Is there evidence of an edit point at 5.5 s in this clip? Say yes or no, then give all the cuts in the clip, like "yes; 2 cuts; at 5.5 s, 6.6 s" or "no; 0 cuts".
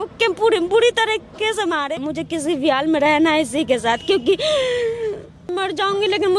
yes; 2 cuts; at 2.0 s, 5.5 s